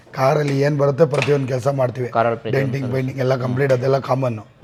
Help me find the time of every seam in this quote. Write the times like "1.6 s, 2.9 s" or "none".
none